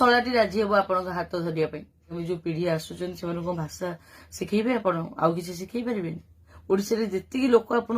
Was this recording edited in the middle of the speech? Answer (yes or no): yes